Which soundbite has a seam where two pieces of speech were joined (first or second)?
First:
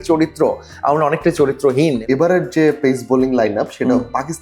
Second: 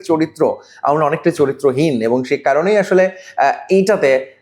first